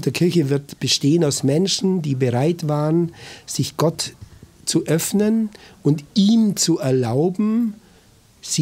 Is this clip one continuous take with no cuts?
yes; 0 cuts

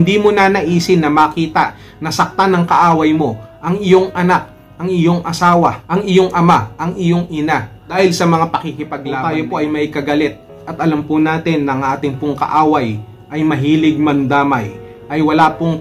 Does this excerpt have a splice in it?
yes; 1 cut; at 9.0 s

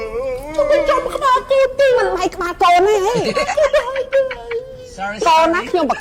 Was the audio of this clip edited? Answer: no; 0 cuts

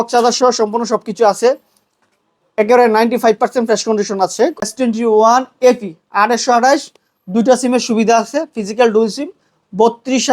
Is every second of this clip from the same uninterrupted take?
no; 1 cut; at 4.7 s

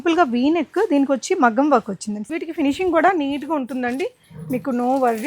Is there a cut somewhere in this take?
yes; 1 cut; at 2.3 s

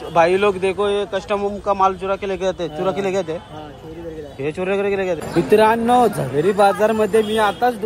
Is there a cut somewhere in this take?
yes; 1 cut; at 5.2 s

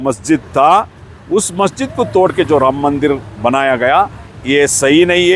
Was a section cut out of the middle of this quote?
no; 0 cuts

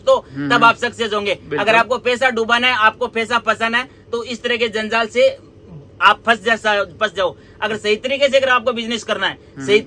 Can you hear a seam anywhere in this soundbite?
no; 0 cuts

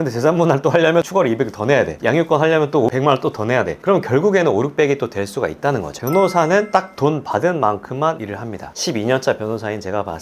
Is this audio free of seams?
no; 2 cuts; at 6.0 s, 8.6 s

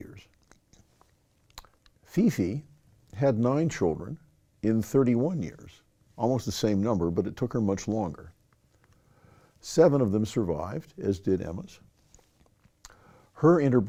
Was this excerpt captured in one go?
yes; 0 cuts

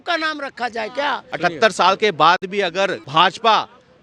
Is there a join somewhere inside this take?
yes; 2 cuts; at 1.3 s, 3.0 s

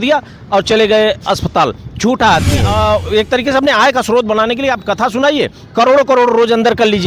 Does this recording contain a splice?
yes; 1 cut; at 2.7 s

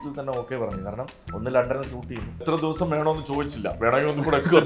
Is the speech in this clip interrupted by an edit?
yes; 1 cut; at 2.4 s

